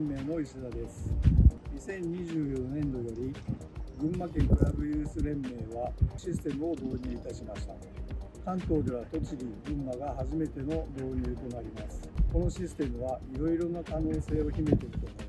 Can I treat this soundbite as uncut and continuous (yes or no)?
yes